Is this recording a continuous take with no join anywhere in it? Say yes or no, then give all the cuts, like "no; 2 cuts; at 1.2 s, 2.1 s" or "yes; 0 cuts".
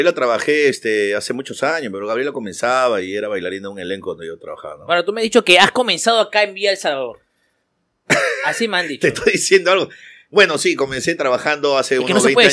yes; 0 cuts